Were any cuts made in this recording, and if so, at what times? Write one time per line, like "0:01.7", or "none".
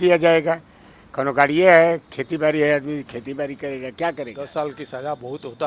0:04.5